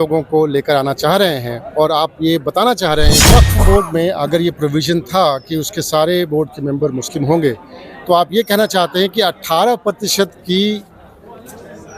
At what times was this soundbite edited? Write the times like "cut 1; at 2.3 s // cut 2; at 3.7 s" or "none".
cut 1; at 3.3 s

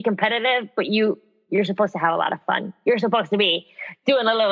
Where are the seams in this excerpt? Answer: none

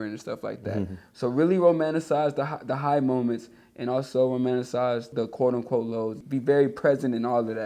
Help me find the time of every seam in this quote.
cut 1; at 5.1 s // cut 2; at 6.2 s

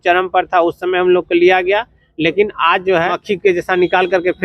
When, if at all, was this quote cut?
cut 1; at 3.2 s

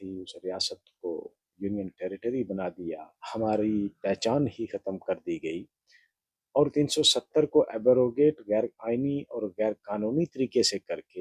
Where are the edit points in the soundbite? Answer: cut 1; at 3.1 s

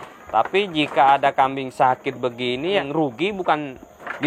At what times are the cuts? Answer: cut 1; at 2.8 s

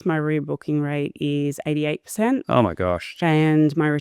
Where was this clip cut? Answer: none

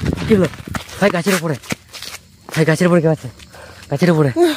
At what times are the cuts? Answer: none

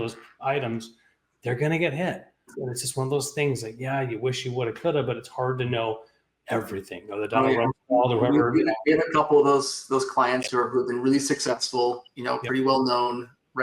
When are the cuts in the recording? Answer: cut 1; at 2.5 s

